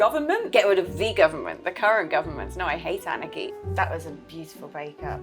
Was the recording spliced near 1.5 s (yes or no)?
no